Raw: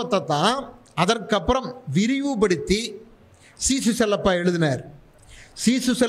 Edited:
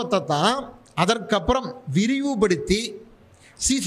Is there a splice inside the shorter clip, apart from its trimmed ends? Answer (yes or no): no